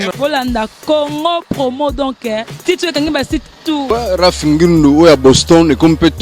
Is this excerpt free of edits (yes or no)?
no